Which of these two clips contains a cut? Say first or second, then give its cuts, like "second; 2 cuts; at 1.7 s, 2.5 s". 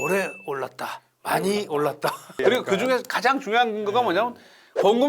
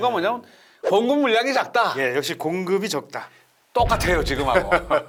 first; 1 cut; at 2.4 s